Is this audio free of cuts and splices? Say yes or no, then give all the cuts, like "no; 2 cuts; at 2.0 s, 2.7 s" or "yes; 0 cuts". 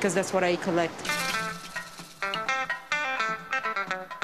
yes; 0 cuts